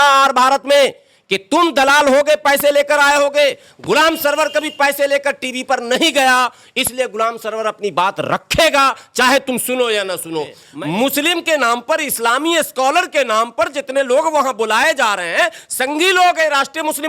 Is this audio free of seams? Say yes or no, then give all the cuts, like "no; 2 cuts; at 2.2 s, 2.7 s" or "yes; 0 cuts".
no; 1 cut; at 10.6 s